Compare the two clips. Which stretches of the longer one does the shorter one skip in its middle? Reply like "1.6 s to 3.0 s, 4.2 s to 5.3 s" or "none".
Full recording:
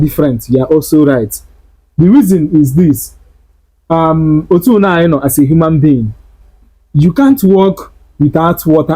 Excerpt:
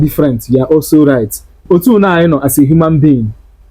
1.6 s to 4.4 s